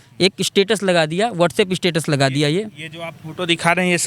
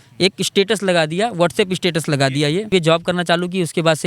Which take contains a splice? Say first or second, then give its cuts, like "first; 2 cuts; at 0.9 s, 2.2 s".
second; 1 cut; at 2.7 s